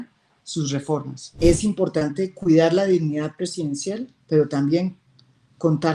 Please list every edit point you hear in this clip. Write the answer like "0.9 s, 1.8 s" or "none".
1.2 s